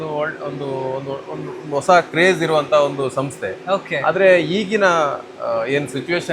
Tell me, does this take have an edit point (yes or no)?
no